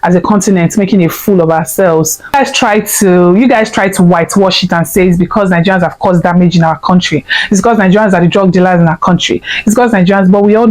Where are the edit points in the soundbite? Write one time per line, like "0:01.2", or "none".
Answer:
0:02.3